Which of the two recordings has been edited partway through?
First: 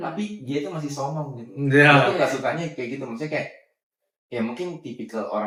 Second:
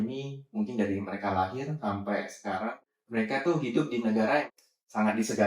second; 2 cuts; at 2.8 s, 4.5 s

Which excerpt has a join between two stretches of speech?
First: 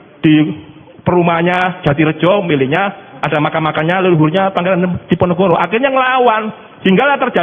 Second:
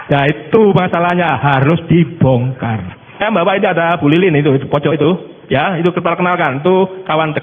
second; 1 cut; at 3.2 s

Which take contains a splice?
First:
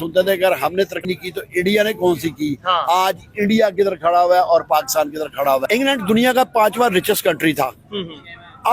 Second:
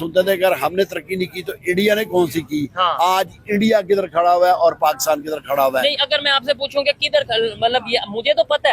first; 2 cuts; at 1.0 s, 5.6 s

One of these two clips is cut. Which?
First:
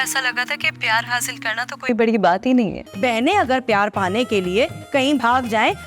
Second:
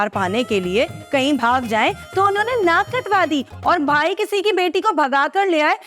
first; 1 cut; at 2.8 s

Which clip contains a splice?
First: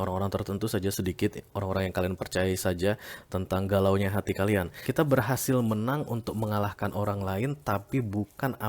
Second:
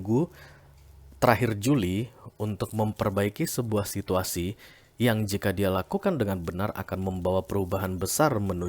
first; 1 cut; at 4.8 s

